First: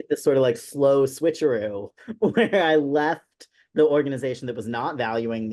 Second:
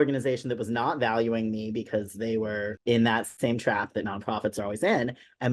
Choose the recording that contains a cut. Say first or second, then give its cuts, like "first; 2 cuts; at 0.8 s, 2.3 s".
second; 2 cuts; at 2.8 s, 3.3 s